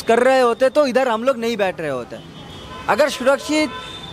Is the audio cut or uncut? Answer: uncut